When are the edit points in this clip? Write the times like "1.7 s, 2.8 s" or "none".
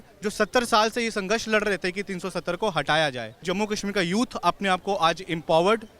3.3 s